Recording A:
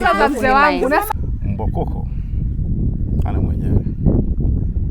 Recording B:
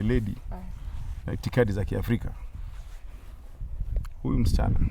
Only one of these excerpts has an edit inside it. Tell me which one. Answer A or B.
A